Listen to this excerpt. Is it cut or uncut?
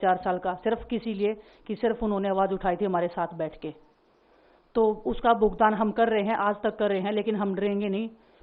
uncut